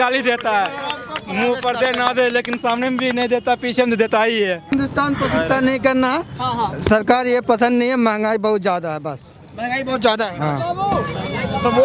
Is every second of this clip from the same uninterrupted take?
yes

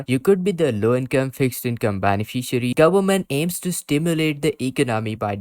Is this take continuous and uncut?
no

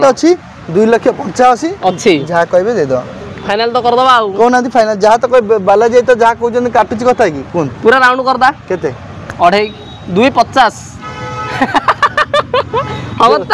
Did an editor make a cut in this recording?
no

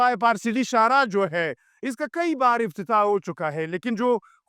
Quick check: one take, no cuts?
yes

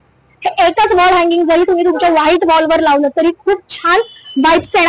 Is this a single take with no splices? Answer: yes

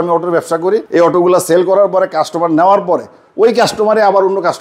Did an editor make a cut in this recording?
no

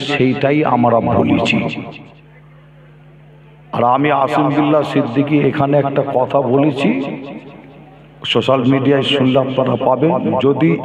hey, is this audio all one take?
no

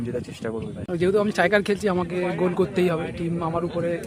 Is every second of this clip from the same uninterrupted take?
no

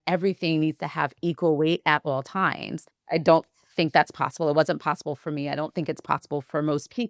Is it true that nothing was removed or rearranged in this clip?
no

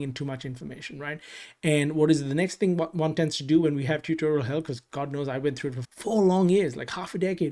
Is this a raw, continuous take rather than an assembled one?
no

